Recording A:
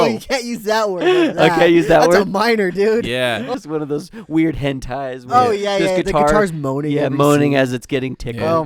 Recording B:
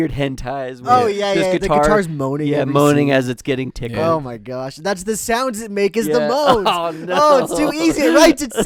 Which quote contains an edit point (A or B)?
A